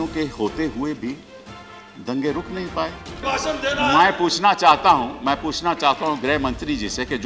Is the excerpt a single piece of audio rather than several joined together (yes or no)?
no